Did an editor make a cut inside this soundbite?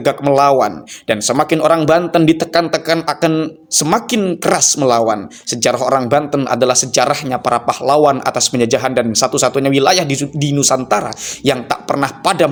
no; 0 cuts

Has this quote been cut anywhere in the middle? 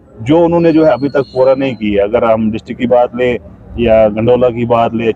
no; 0 cuts

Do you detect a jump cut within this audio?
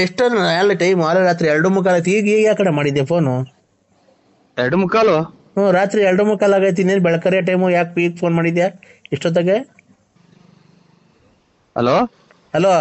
no; 0 cuts

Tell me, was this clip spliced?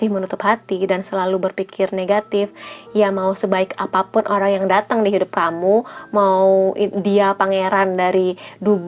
no; 0 cuts

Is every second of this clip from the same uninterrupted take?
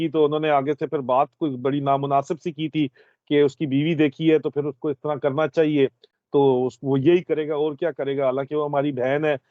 yes; 0 cuts

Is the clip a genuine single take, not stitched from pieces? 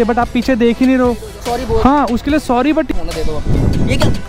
no; 2 cuts; at 1.3 s, 2.9 s

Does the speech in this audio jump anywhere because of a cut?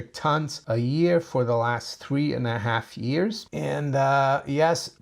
yes; 1 cut; at 3.5 s

